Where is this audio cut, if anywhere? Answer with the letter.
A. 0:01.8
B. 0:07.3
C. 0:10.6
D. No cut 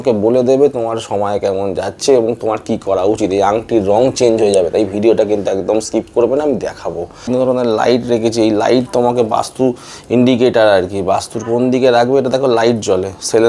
B